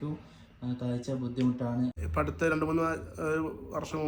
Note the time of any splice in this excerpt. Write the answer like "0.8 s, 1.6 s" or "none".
2.0 s